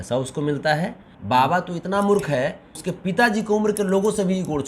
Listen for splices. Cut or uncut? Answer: cut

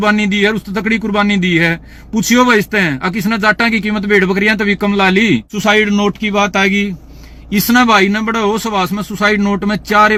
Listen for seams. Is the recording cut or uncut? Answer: uncut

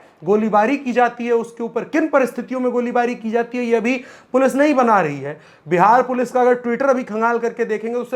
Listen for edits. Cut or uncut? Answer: uncut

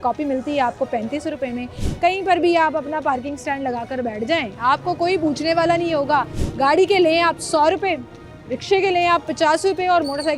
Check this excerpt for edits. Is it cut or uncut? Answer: uncut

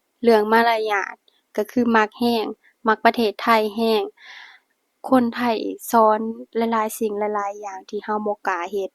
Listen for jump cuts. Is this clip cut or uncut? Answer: cut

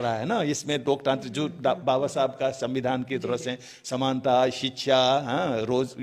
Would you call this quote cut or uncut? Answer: uncut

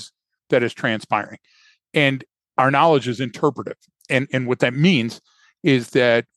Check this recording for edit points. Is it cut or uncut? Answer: cut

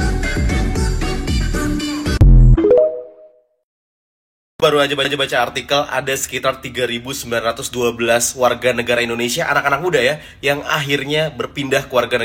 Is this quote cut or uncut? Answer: uncut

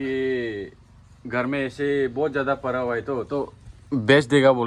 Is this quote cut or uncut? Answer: uncut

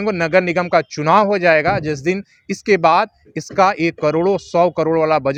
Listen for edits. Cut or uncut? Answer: uncut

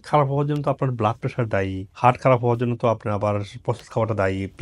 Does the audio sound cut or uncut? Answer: uncut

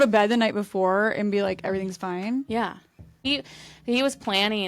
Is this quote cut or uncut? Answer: cut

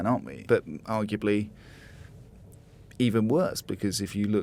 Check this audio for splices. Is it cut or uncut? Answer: uncut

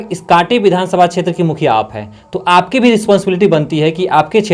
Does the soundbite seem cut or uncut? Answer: uncut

